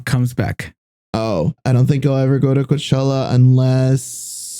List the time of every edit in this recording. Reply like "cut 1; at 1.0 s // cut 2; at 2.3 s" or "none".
cut 1; at 1.6 s